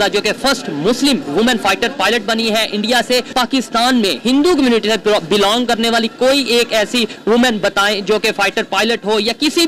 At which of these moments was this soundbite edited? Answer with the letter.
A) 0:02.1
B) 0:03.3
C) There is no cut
B